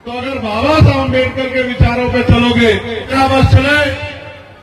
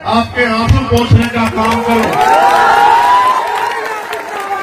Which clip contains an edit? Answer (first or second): first